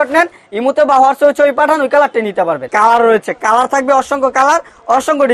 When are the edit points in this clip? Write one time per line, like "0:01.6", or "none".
0:02.7